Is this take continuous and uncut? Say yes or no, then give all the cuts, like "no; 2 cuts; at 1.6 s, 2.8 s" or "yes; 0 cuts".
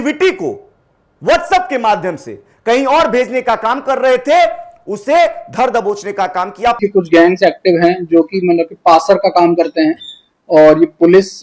no; 1 cut; at 6.8 s